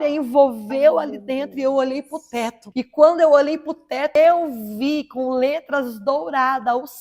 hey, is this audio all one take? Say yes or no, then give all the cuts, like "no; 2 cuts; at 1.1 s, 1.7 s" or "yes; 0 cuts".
no; 1 cut; at 2.6 s